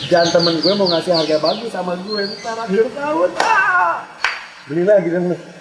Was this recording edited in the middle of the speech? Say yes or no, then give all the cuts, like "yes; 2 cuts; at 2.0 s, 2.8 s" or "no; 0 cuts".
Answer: no; 0 cuts